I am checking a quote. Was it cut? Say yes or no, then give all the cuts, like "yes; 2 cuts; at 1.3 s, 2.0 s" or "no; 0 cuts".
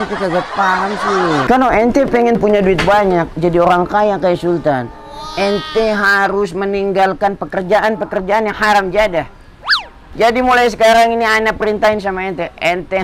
yes; 2 cuts; at 1.5 s, 10.0 s